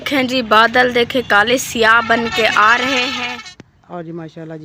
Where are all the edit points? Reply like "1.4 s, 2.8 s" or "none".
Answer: 3.2 s

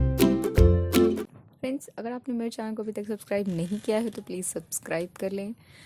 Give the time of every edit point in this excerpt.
1.3 s

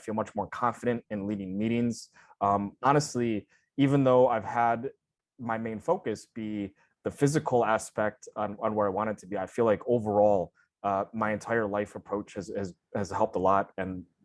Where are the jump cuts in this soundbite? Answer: none

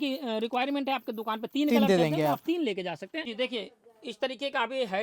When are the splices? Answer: 3.2 s

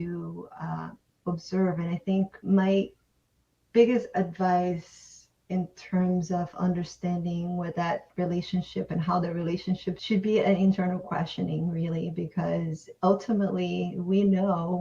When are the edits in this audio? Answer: 2.4 s, 10.0 s

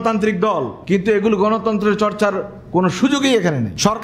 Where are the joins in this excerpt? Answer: none

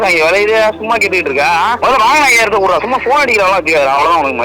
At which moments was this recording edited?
0.7 s, 1.8 s

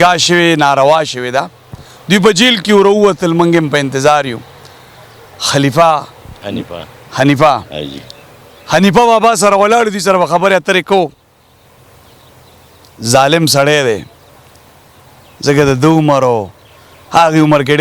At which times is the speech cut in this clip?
none

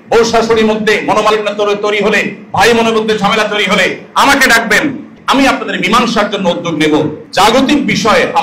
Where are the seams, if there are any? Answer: 5.1 s, 7.2 s

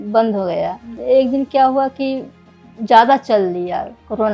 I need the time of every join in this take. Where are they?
0.9 s

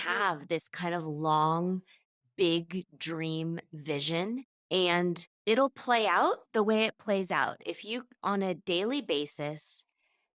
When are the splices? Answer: none

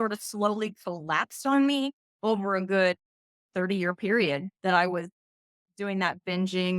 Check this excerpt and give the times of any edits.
2.0 s, 3.4 s

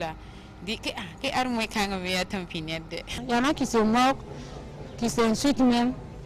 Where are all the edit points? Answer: 3.2 s

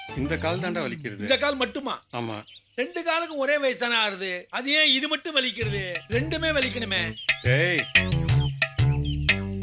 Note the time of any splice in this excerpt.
none

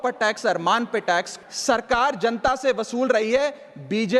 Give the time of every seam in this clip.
1.3 s

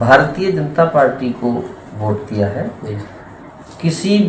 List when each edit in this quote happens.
none

